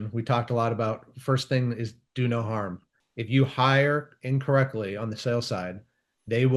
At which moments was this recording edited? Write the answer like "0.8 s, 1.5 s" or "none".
2.9 s